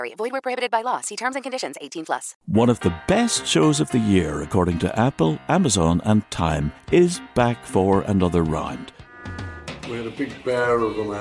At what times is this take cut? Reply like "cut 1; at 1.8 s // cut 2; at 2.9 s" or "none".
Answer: cut 1; at 2.3 s